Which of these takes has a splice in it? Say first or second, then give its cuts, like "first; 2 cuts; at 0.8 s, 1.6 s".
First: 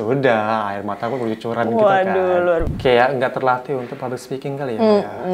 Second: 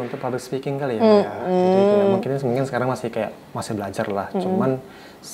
first; 1 cut; at 2.7 s